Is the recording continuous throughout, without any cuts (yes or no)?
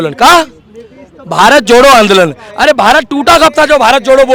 yes